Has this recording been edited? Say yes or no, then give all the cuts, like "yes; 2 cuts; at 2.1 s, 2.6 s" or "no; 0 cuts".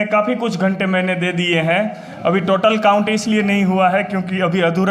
no; 0 cuts